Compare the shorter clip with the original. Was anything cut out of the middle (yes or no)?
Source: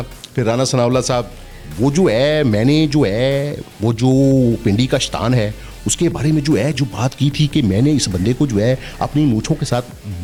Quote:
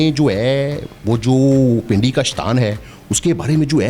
no